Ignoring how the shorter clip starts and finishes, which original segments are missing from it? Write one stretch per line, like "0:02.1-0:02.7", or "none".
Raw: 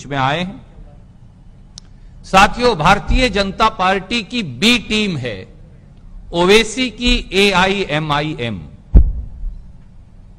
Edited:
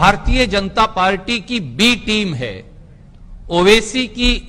none